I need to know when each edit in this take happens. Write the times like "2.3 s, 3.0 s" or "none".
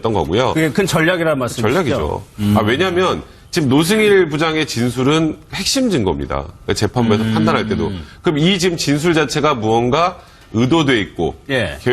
1.4 s